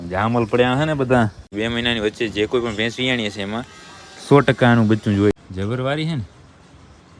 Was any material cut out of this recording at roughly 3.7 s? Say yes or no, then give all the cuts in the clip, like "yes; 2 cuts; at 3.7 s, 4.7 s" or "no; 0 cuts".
no; 2 cuts; at 1.6 s, 5.3 s